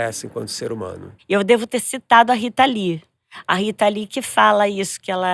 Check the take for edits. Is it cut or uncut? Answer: cut